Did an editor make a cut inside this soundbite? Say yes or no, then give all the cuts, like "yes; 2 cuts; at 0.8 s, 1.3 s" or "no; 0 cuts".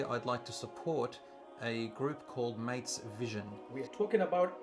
yes; 1 cut; at 3.6 s